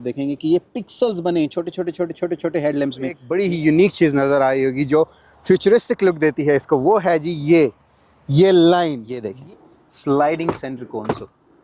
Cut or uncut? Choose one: cut